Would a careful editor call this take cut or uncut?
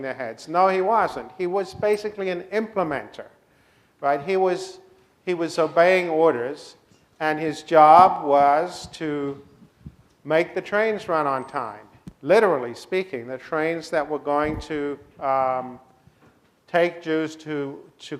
cut